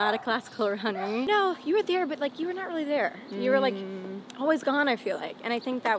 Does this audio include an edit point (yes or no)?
yes